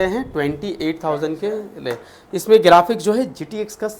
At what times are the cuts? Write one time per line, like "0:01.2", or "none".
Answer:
none